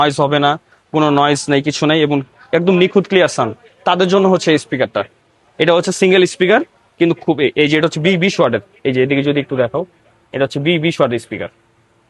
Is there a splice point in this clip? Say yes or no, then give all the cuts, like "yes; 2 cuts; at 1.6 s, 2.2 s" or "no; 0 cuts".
no; 0 cuts